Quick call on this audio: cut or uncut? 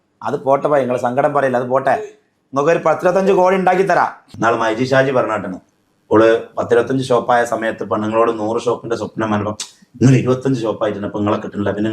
cut